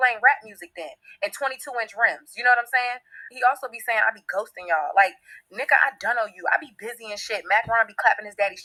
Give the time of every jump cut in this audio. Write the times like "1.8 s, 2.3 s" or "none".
none